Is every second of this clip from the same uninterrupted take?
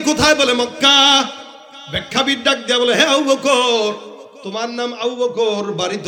yes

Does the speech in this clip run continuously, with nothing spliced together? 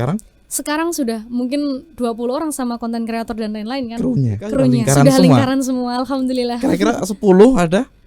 no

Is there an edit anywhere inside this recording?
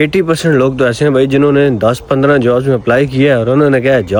no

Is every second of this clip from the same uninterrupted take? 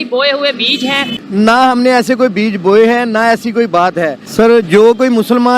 no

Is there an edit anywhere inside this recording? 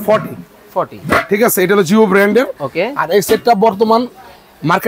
no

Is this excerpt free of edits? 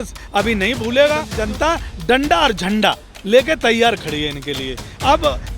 no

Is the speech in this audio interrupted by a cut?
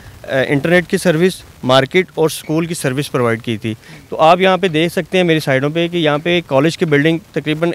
no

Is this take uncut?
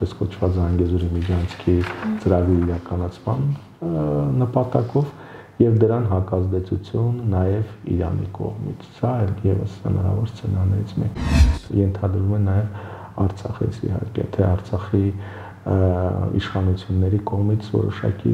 no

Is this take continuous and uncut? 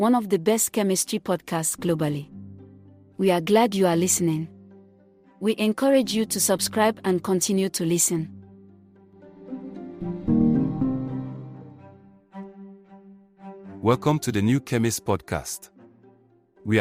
yes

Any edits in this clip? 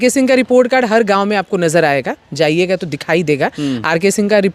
no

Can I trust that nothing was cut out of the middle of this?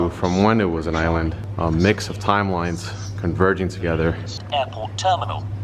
no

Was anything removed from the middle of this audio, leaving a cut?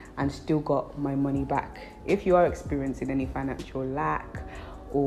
yes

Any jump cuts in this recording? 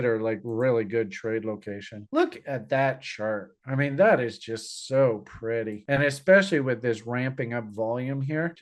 no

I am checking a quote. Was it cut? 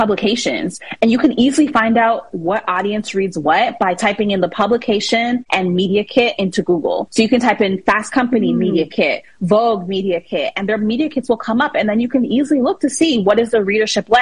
yes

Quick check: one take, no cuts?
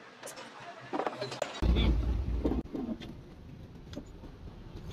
yes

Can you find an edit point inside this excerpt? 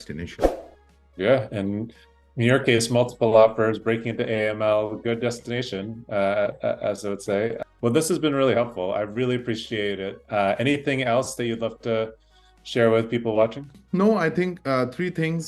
no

